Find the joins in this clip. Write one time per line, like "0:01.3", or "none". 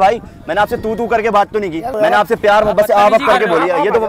0:01.9